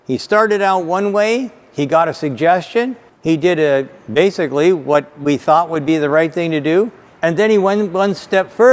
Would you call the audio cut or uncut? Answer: uncut